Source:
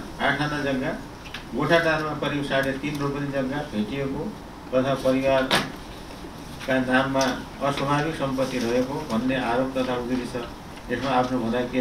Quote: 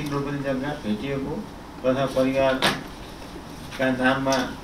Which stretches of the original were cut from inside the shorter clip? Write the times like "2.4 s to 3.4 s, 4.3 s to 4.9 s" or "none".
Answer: none